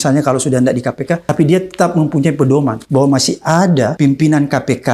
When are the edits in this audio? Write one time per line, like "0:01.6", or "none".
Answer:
0:01.3
0:02.8
0:03.9